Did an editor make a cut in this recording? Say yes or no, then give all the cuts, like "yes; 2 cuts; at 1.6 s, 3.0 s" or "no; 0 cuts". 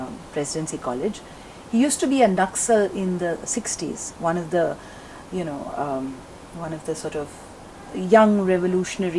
no; 0 cuts